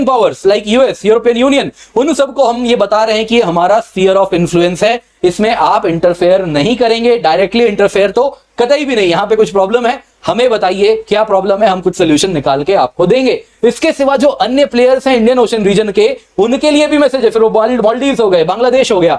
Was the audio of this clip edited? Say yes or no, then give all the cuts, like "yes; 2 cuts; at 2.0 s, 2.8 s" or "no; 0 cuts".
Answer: no; 0 cuts